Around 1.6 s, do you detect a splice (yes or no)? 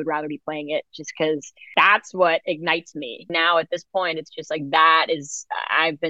yes